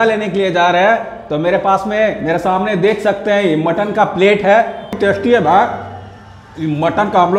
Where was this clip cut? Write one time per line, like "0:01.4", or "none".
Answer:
0:04.9